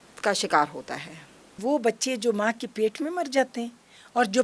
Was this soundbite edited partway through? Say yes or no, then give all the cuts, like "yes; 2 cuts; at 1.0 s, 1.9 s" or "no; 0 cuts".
yes; 1 cut; at 1.6 s